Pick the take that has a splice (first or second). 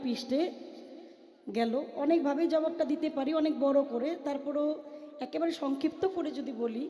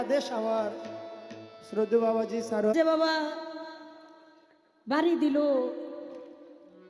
second